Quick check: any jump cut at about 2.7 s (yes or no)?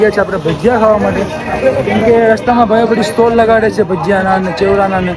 no